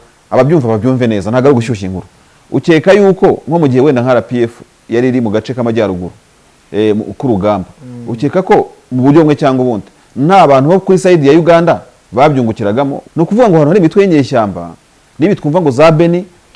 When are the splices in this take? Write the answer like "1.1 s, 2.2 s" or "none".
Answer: 13.0 s